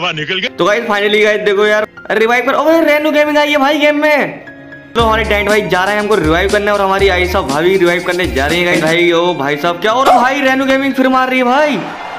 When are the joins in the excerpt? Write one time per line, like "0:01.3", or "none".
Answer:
0:01.8
0:04.9
0:08.8

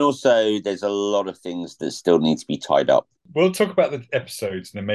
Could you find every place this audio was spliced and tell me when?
0:03.2

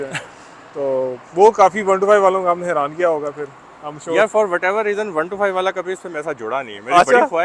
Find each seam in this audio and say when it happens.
none

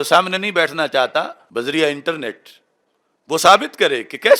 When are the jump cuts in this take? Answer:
0:01.4

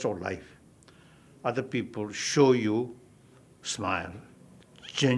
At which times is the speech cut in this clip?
0:02.6

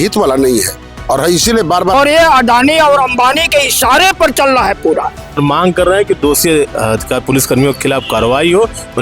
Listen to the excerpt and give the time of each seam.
0:01.9
0:05.4

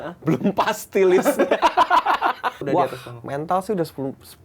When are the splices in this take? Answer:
0:02.6

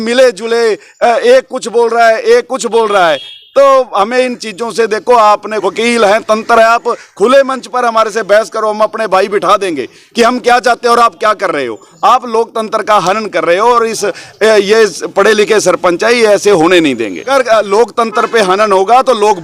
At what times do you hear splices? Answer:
0:05.5
0:17.3

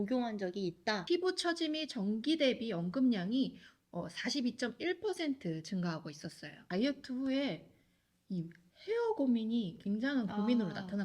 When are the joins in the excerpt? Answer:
0:01.0
0:06.6

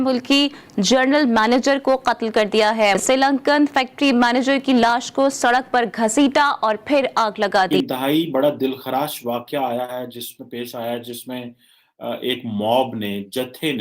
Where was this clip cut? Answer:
0:03.0
0:07.7

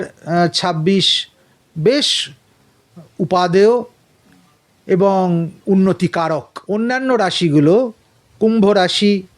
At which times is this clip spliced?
0:06.5

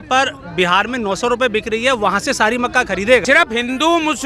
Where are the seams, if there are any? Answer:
0:03.2

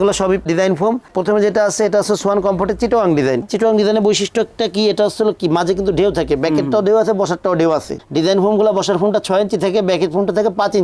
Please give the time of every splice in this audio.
none

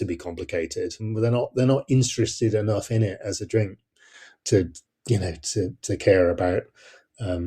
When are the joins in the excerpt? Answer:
0:01.0

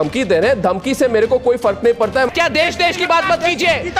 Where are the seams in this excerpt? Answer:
0:02.3

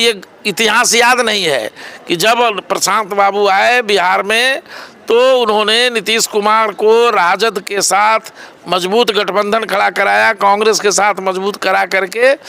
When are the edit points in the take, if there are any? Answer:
none

